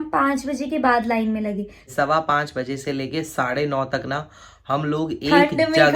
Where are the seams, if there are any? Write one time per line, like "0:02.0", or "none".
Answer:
0:01.9